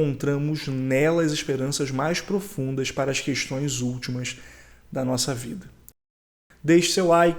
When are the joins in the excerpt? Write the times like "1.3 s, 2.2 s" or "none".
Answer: 6.3 s